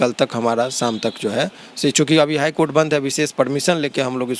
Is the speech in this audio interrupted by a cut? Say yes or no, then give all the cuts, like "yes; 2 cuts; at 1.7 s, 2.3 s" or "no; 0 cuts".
no; 0 cuts